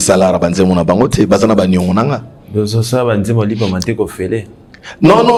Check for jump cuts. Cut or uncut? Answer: uncut